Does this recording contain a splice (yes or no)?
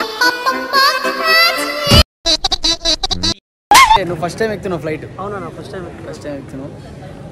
yes